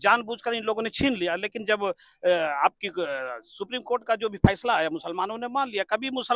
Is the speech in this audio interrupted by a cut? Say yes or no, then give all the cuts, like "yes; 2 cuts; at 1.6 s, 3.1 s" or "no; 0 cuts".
no; 0 cuts